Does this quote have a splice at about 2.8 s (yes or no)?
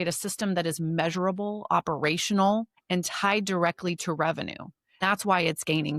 yes